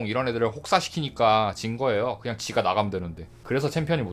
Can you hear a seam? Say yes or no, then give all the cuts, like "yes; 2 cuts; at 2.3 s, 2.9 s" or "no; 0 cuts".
no; 0 cuts